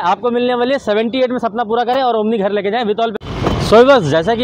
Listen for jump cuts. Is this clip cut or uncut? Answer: cut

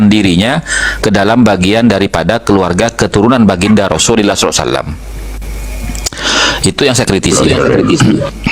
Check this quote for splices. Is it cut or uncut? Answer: uncut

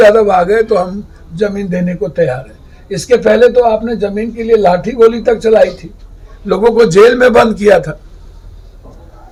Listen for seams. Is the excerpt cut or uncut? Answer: uncut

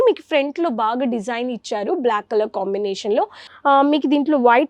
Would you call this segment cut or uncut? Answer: cut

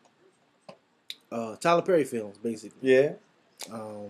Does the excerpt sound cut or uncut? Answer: uncut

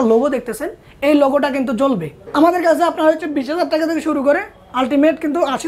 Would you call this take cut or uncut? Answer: cut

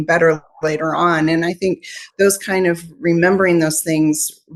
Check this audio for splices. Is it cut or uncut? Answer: uncut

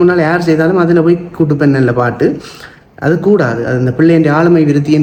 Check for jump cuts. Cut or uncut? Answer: uncut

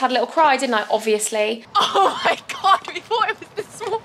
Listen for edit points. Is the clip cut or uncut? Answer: cut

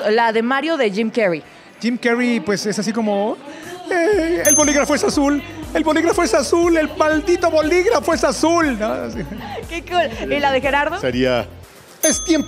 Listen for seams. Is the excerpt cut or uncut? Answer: uncut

